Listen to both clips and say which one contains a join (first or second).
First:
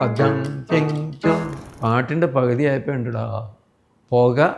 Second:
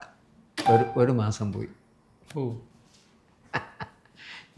first